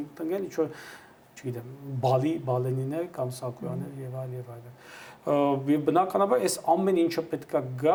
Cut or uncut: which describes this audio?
uncut